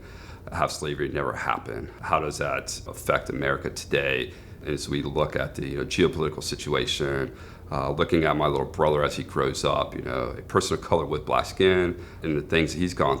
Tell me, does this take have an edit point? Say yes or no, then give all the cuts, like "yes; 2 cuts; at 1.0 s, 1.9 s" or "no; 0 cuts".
yes; 4 cuts; at 1.9 s, 2.8 s, 4.5 s, 12.2 s